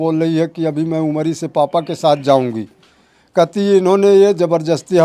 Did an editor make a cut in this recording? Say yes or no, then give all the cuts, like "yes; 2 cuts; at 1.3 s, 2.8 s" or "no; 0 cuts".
no; 0 cuts